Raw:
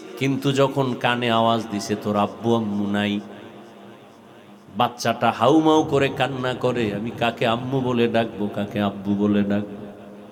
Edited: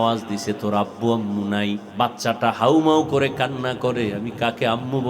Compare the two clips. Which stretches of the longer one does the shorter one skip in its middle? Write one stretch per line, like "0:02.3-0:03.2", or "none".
0:03.3-0:04.7